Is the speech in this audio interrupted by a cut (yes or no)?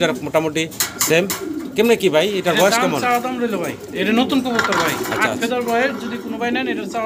no